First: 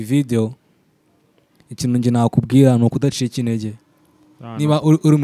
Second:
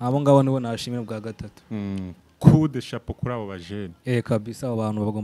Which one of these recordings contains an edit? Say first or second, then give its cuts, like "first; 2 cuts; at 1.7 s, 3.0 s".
second; 1 cut; at 2.1 s